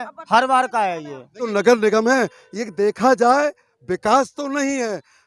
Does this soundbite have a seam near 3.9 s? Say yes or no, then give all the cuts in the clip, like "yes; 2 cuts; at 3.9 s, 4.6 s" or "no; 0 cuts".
no; 1 cut; at 1.4 s